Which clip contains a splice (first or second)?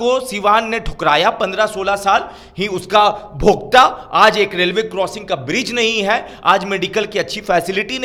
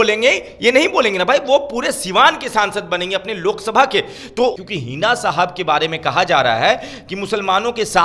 second